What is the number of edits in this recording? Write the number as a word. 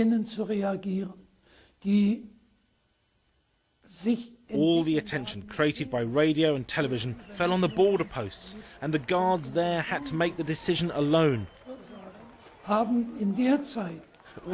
zero